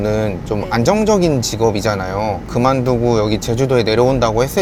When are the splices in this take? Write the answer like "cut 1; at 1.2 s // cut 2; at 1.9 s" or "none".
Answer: none